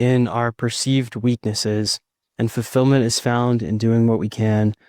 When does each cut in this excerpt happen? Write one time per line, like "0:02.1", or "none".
none

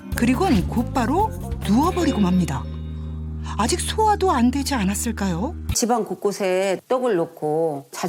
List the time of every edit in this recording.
0:05.7

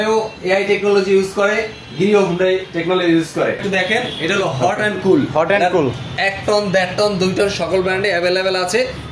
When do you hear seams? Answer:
0:03.6

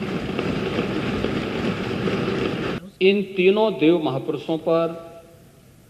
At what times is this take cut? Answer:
0:02.8

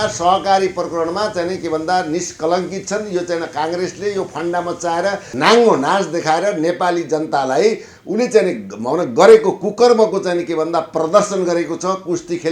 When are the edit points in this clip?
0:05.3

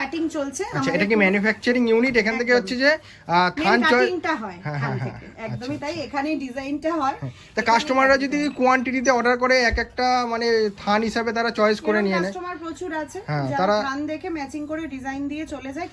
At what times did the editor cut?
none

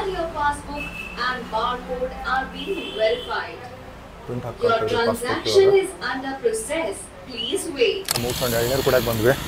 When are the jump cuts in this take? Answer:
0:08.1

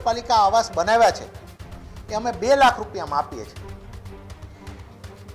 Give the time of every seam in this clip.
none

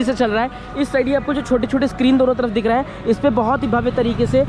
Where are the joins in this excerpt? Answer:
none

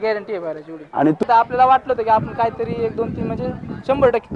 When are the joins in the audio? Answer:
0:01.2

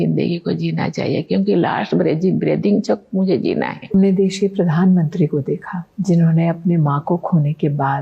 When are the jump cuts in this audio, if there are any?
0:03.9

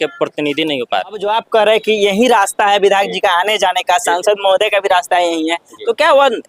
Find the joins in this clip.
0:01.3

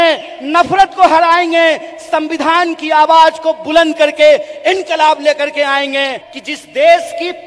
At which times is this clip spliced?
0:06.2

